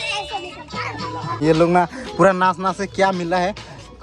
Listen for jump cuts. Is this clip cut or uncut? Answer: cut